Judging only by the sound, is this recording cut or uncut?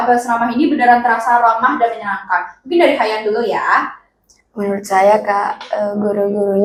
uncut